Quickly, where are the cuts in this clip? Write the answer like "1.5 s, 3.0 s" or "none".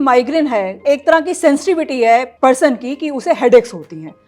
0.8 s, 2.3 s